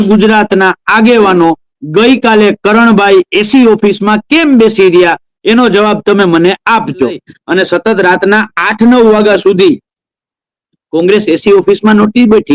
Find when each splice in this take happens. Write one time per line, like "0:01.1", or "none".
0:07.3